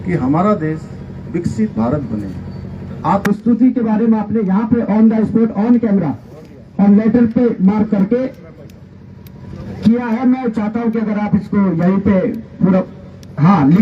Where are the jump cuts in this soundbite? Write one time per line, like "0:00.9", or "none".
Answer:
0:03.2